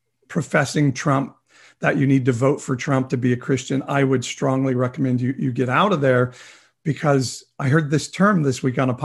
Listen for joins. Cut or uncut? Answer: uncut